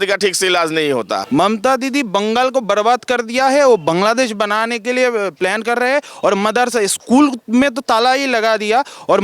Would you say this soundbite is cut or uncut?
cut